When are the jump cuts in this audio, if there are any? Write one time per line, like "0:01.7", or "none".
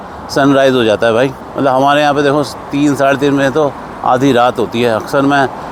none

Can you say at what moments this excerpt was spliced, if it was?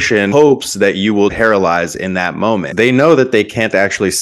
0:01.3
0:02.7

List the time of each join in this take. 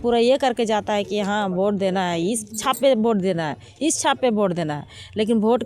none

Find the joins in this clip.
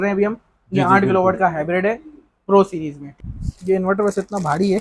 0:03.0

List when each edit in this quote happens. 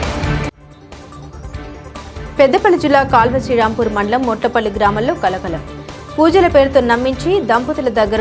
0:01.8

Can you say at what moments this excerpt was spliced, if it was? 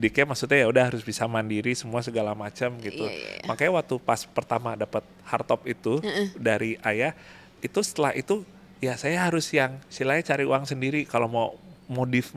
none

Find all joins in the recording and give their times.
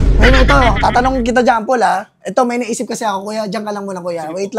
none

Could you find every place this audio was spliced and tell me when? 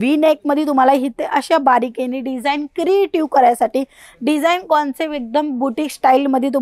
none

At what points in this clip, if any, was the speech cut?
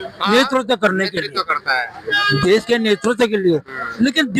none

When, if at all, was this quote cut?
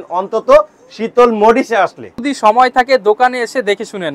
0:02.2

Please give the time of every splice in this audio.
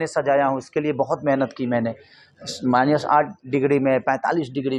none

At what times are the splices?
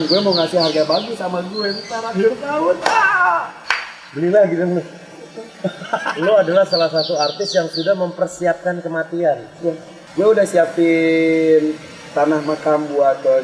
0:06.1
0:09.9

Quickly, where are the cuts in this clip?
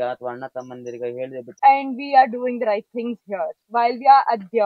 0:01.5

